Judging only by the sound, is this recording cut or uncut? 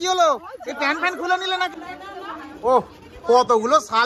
cut